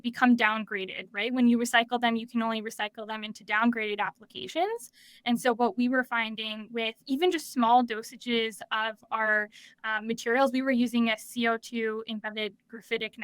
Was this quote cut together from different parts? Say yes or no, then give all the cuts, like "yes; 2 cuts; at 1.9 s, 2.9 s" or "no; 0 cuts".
no; 0 cuts